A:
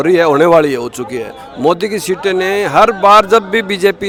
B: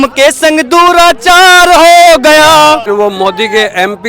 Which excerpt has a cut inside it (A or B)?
B